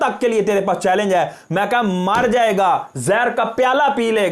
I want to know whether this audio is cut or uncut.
uncut